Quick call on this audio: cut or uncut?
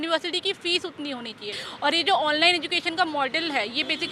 cut